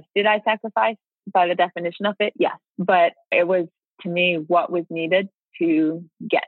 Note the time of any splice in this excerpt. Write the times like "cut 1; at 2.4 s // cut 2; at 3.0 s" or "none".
cut 1; at 2.7 s // cut 2; at 3.3 s